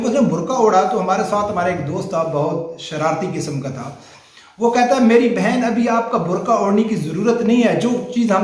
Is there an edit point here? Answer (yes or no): no